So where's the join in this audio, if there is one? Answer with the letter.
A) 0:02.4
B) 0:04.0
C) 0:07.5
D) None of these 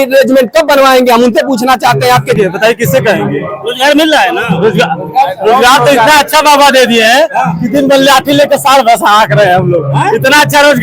A